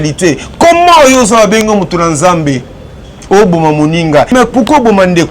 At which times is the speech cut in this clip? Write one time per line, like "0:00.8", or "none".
0:04.3